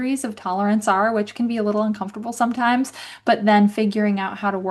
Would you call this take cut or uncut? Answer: uncut